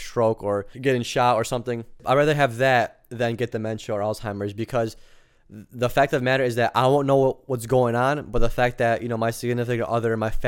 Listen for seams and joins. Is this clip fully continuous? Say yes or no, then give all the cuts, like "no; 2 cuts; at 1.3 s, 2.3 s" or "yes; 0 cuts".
no; 1 cut; at 2.0 s